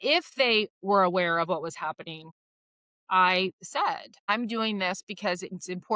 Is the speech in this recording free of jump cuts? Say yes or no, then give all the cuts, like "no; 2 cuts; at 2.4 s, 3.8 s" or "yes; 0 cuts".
no; 1 cut; at 4.1 s